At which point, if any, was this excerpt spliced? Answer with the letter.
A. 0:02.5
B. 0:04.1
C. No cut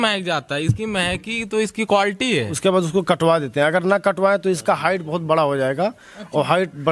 A